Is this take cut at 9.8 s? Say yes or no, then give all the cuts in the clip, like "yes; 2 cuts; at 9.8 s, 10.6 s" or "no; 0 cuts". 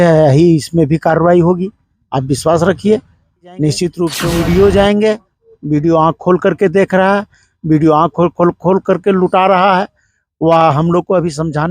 no; 1 cut; at 4.2 s